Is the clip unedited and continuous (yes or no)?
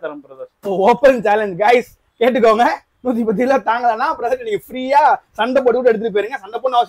yes